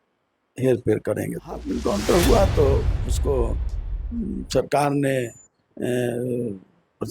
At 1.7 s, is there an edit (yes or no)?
yes